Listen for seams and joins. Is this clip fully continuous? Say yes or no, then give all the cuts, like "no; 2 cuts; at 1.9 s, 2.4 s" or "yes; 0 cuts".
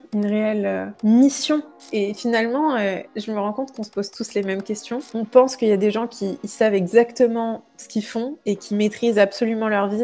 no; 2 cuts; at 1.8 s, 5.1 s